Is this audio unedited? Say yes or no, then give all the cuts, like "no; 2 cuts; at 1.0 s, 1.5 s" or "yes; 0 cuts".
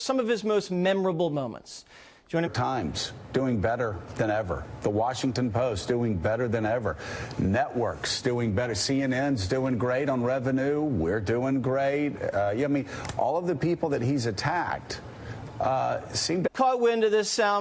yes; 0 cuts